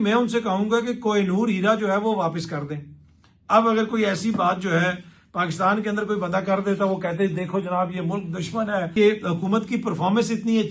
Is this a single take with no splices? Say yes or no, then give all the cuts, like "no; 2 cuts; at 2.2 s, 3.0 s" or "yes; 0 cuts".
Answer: no; 1 cut; at 8.9 s